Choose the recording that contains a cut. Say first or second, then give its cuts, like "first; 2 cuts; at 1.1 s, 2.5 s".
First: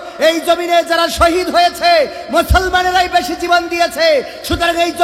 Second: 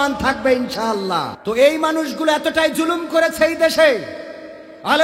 second; 1 cut; at 1.3 s